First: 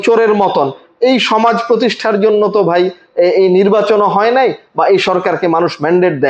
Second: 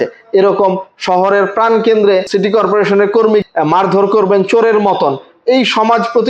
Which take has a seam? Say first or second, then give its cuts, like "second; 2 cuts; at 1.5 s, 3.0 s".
second; 2 cuts; at 2.3 s, 3.4 s